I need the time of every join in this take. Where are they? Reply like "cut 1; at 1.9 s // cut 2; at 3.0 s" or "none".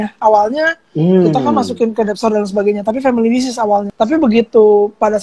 cut 1; at 3.9 s